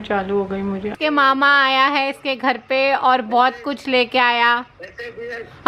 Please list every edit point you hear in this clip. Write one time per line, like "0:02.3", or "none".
0:00.9